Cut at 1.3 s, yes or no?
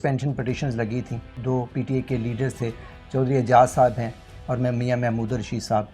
yes